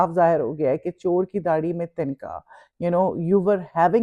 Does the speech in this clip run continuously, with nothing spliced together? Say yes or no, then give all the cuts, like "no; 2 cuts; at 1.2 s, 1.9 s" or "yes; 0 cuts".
yes; 0 cuts